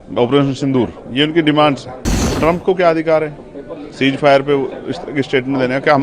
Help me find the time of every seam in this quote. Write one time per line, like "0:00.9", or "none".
0:02.2